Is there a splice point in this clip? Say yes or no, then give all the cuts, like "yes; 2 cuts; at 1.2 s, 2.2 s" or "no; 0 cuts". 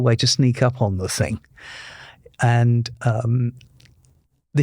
no; 0 cuts